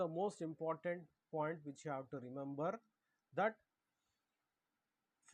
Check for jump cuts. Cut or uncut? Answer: uncut